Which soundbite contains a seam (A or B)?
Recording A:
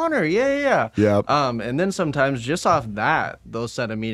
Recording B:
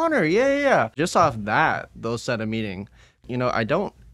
B